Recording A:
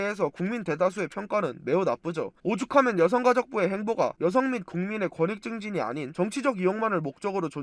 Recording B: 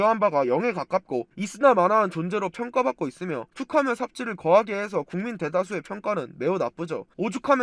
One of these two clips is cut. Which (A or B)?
B